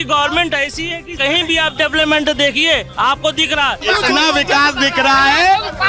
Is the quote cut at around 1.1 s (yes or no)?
yes